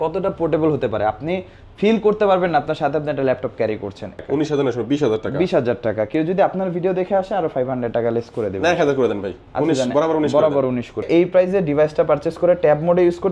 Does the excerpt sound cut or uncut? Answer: cut